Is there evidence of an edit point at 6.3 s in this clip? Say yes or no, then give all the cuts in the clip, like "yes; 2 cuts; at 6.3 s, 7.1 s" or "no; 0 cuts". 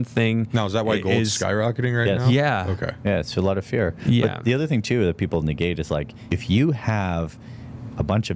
yes; 1 cut; at 6.3 s